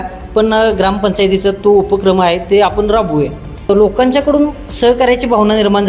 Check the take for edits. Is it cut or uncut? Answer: cut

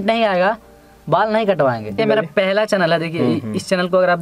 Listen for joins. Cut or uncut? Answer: cut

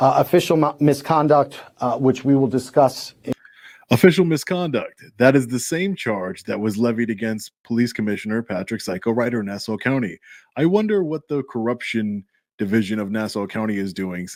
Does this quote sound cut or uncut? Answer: uncut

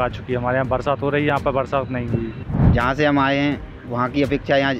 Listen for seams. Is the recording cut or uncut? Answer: cut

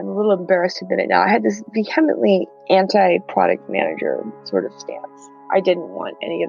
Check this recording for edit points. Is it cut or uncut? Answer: cut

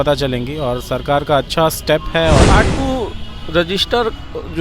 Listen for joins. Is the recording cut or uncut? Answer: cut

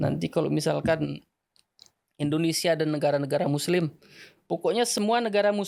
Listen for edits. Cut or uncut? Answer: uncut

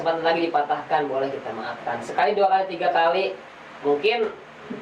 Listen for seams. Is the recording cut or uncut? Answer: uncut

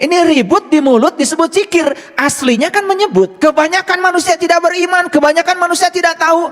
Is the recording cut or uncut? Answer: cut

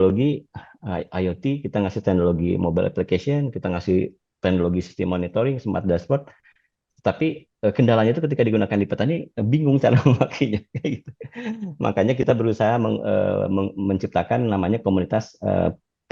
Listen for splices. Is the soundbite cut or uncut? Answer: uncut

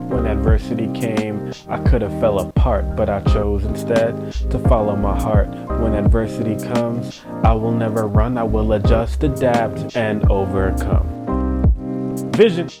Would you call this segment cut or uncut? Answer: uncut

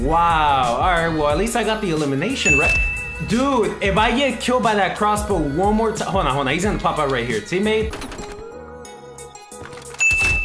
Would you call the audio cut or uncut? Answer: cut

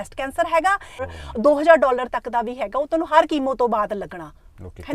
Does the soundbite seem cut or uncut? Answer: cut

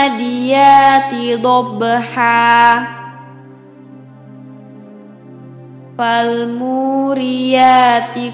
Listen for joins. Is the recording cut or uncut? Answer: uncut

